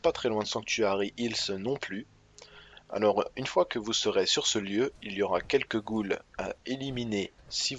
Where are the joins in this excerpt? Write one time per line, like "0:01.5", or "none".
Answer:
0:04.5

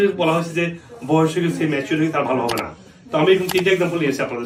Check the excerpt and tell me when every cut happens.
none

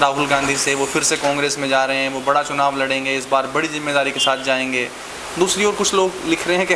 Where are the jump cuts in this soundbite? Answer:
none

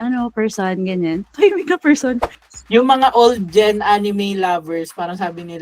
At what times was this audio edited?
0:02.4

